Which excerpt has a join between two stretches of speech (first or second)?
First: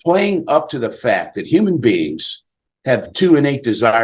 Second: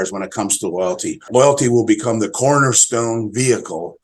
second